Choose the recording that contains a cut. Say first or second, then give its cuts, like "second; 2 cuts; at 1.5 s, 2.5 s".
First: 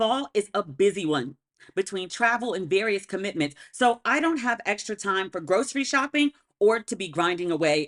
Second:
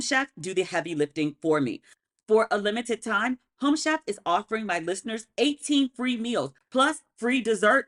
second; 1 cut; at 1.9 s